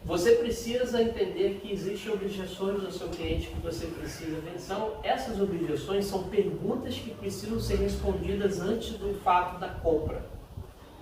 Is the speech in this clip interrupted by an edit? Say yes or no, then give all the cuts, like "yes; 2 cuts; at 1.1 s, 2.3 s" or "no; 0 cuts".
yes; 1 cut; at 4.6 s